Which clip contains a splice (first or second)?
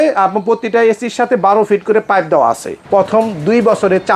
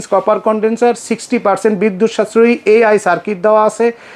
first